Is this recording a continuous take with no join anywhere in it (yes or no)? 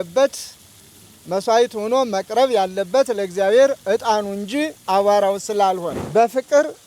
no